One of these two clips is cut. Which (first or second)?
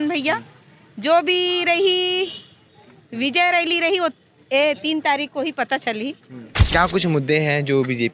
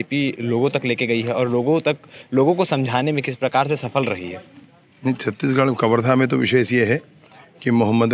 first